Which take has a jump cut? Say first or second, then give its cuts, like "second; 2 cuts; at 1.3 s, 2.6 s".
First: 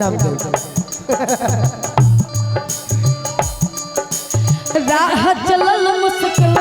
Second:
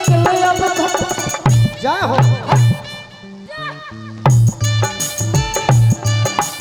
first; 1 cut; at 4.7 s